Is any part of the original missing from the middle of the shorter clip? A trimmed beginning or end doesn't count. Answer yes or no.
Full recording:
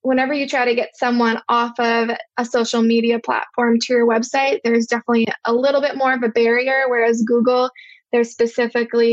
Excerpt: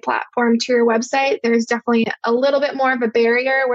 no